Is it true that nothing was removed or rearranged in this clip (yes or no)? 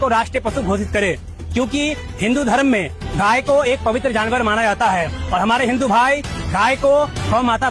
yes